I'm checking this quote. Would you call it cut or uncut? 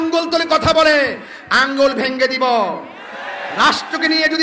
uncut